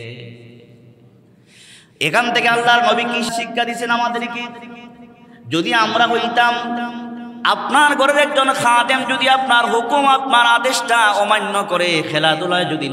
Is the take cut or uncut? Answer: cut